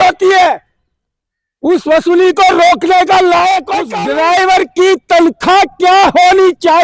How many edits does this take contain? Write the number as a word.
one